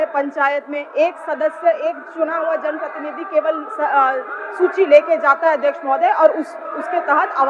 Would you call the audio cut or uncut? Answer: uncut